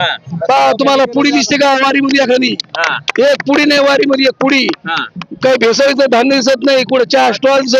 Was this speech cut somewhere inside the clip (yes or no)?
no